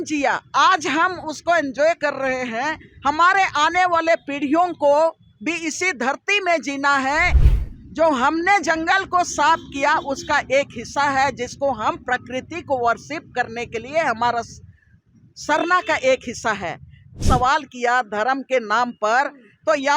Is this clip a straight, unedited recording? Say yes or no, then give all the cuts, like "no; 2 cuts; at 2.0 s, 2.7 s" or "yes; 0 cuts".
no; 2 cuts; at 7.4 s, 17.2 s